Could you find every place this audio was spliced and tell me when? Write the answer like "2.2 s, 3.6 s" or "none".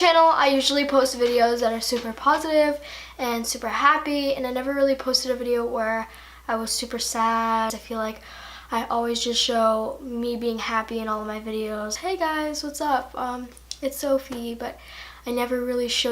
4.4 s